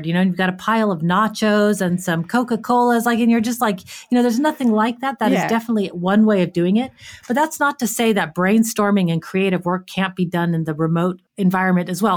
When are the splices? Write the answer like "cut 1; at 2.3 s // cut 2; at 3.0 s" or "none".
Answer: cut 1; at 11.3 s